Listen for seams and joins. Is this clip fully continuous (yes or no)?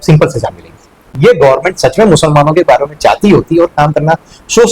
no